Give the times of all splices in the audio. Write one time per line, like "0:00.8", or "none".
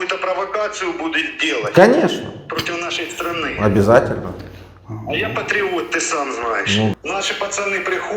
0:06.9